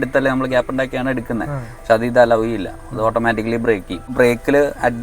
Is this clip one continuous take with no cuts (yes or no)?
no